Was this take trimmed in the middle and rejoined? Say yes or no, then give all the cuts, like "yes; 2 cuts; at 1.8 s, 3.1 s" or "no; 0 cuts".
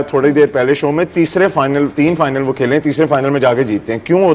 no; 0 cuts